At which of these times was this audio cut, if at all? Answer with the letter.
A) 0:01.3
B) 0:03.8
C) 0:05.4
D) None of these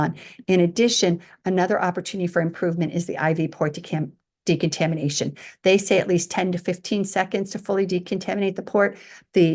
D